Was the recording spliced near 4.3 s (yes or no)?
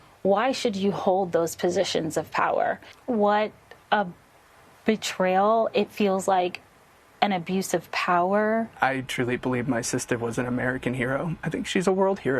no